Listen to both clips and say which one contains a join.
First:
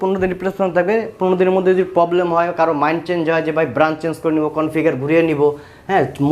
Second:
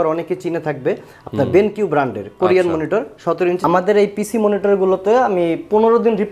second; 1 cut; at 3.6 s

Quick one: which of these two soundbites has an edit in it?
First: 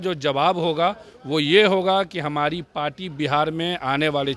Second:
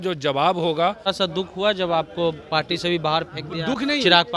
second; 1 cut; at 1.1 s

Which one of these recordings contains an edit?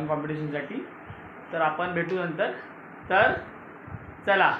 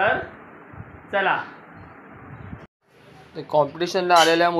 second; 1 cut; at 2.7 s

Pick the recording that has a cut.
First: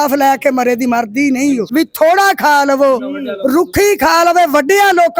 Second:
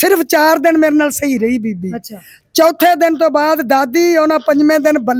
first; 1 cut; at 1.6 s

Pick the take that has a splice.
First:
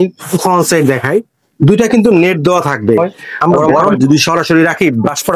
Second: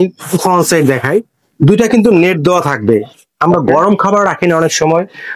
first; 1 cut; at 4.0 s

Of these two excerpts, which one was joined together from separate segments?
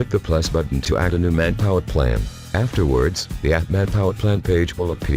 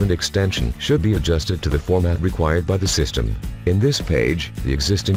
first; 2 cuts; at 1.9 s, 4.4 s

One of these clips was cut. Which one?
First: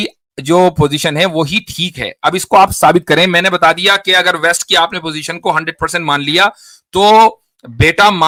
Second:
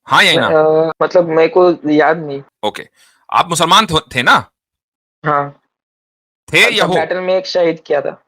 second; 2 cuts; at 0.9 s, 2.5 s

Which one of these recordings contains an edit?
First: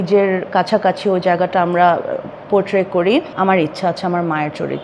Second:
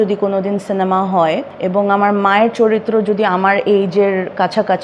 first; 1 cut; at 3.3 s

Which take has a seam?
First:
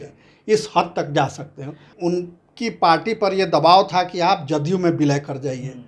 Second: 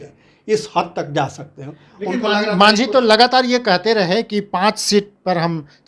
first; 1 cut; at 1.9 s

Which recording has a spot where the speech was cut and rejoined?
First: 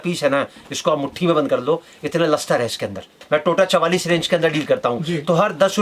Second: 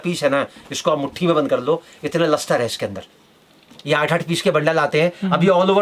first; 1 cut; at 3.2 s

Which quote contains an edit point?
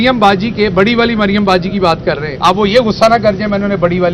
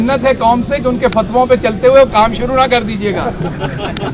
first; 1 cut; at 2.3 s

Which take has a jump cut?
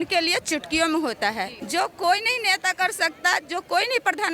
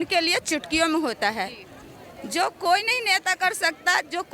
first; 1 cut; at 1.6 s

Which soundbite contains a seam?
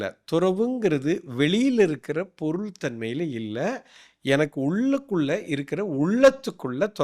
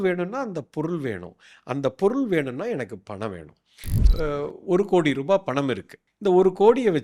second; 1 cut; at 4.0 s

